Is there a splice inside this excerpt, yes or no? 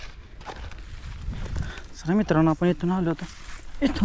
no